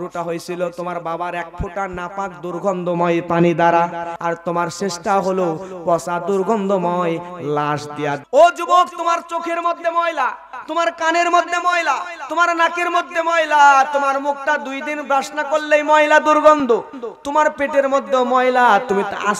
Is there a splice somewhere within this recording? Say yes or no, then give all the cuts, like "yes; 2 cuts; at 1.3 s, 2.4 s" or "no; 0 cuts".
yes; 2 cuts; at 4.1 s, 8.2 s